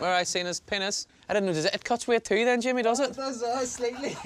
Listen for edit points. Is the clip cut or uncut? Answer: cut